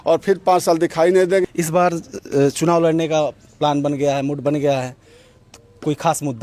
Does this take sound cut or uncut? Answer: cut